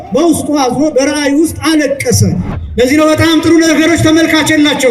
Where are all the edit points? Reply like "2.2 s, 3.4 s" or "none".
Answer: 2.5 s